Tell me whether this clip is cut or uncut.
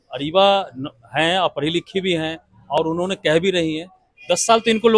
uncut